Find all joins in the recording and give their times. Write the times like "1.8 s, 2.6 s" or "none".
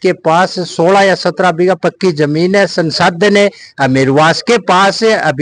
none